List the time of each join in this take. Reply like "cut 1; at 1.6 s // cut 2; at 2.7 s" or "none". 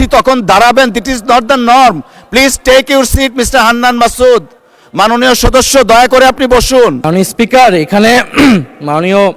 cut 1; at 7.0 s